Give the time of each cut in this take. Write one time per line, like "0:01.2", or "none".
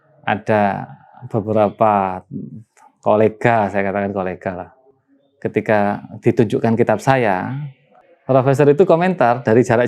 0:07.9